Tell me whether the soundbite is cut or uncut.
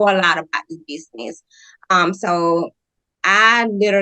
uncut